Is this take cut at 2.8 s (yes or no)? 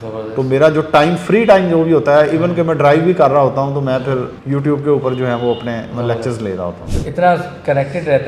no